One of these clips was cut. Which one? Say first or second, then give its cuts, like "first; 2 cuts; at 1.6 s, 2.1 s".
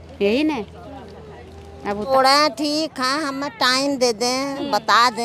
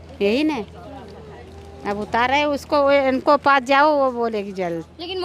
first; 1 cut; at 2.1 s